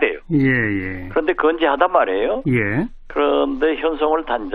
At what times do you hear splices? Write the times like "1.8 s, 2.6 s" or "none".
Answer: 2.6 s